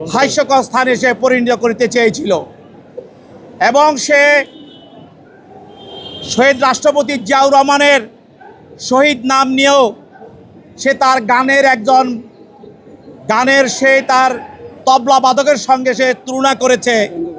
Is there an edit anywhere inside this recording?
no; 0 cuts

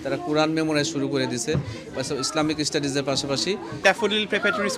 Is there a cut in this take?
yes; 1 cut; at 3.8 s

